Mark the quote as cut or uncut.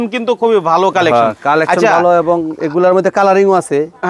uncut